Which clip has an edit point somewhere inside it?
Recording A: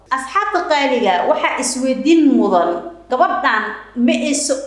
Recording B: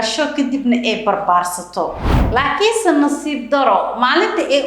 B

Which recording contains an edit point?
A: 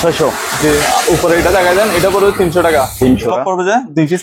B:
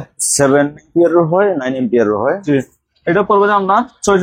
A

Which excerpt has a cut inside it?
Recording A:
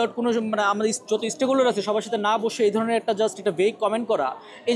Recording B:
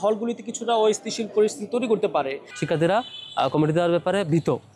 B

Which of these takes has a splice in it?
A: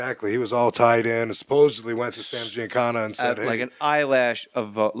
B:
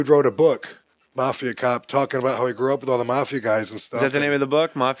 A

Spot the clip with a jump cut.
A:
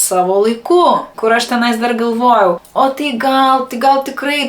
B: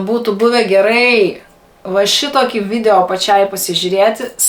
A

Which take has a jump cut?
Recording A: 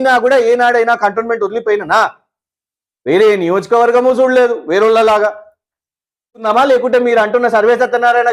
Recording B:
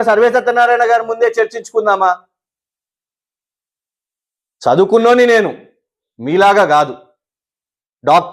A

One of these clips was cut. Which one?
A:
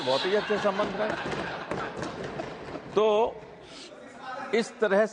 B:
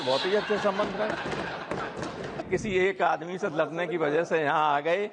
B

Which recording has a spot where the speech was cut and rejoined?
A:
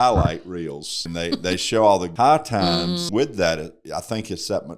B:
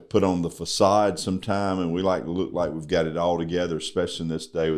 A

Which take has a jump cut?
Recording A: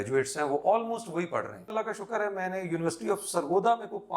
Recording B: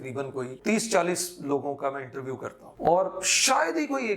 A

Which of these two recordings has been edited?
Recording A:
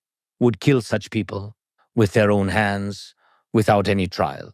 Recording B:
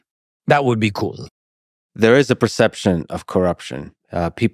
B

